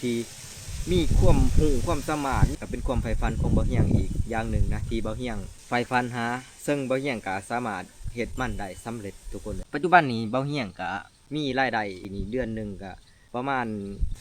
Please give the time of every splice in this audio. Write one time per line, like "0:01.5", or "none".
0:02.5
0:09.6